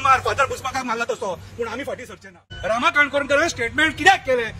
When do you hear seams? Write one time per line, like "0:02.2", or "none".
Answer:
0:02.5